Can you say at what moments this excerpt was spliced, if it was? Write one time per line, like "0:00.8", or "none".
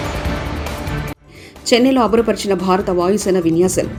none